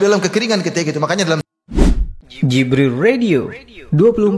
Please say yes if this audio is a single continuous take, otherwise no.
no